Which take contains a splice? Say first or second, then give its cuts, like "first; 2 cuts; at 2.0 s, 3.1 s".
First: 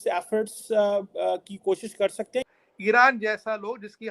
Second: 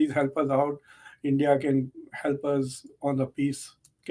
first; 1 cut; at 2.6 s